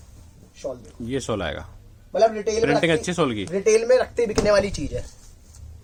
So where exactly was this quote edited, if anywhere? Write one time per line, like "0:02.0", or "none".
none